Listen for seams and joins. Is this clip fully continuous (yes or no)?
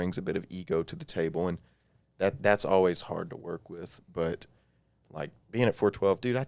yes